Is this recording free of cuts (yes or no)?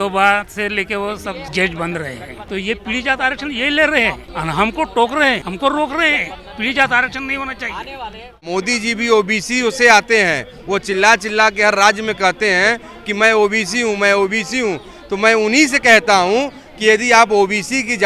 no